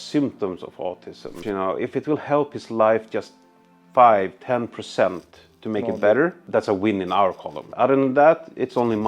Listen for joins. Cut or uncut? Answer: cut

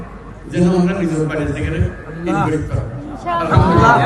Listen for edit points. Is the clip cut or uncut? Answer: uncut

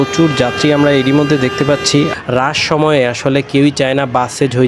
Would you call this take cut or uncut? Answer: cut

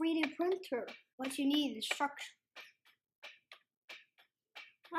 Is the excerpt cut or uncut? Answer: cut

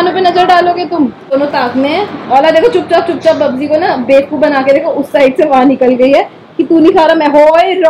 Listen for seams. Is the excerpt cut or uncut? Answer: cut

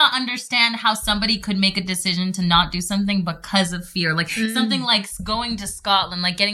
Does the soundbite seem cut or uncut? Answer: cut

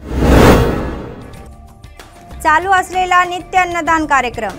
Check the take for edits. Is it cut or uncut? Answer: cut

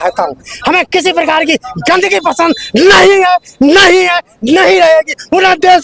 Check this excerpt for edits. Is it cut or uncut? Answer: uncut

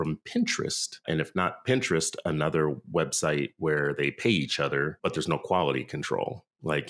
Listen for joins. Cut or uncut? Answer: cut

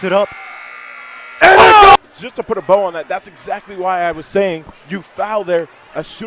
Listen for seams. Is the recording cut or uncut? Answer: cut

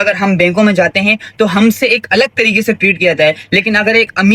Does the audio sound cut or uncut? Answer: uncut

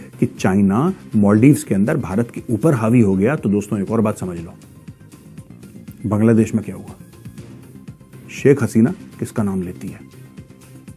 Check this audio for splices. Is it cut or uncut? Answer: uncut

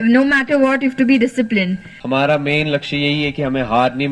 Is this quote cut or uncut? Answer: cut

